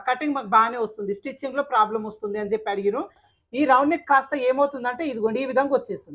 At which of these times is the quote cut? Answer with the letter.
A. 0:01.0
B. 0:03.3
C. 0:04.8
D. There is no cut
B